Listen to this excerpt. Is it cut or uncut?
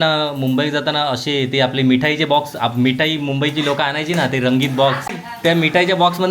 cut